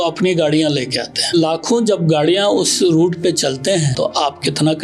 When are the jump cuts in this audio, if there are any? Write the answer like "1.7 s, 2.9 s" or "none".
1.3 s, 3.9 s